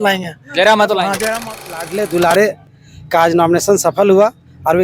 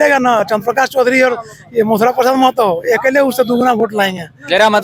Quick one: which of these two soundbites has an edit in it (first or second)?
first